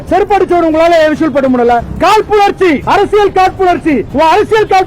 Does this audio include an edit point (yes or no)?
yes